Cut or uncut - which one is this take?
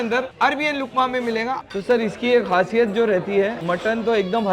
cut